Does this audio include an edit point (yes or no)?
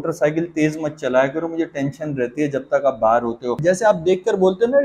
yes